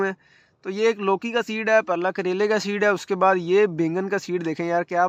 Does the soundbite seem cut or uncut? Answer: uncut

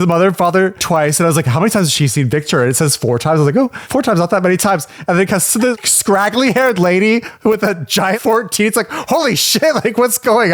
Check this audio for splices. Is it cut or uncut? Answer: uncut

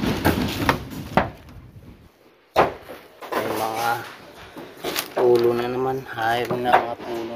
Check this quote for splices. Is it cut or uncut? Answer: uncut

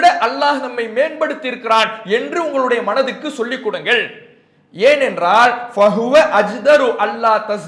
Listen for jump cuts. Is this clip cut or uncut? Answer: uncut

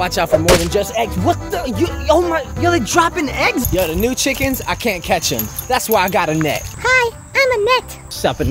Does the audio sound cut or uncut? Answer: cut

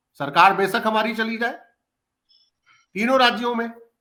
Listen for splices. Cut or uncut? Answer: uncut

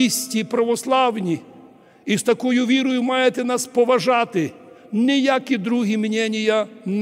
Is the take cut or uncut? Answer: uncut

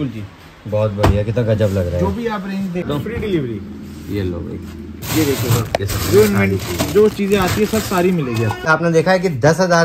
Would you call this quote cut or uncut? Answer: cut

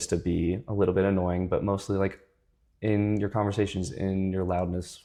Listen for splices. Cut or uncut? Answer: uncut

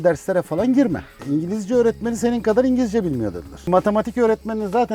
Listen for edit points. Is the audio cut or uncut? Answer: cut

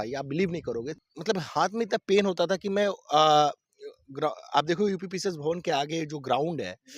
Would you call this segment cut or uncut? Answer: cut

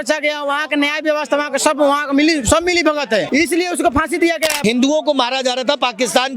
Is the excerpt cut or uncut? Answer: cut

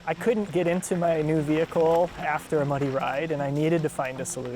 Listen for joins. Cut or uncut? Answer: uncut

